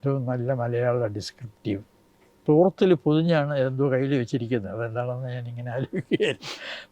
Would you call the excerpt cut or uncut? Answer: cut